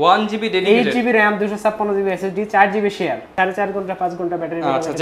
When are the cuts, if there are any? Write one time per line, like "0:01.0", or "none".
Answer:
0:03.2